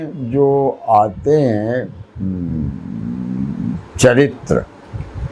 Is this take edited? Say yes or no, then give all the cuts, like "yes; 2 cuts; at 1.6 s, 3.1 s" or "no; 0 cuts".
no; 0 cuts